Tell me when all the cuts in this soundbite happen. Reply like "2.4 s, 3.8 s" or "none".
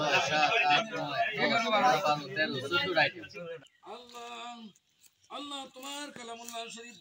3.7 s